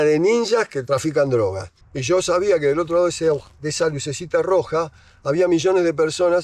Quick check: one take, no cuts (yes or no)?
no